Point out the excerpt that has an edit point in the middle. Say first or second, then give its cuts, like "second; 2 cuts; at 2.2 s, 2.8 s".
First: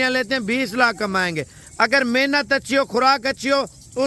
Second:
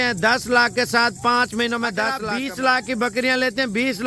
second; 1 cut; at 2.2 s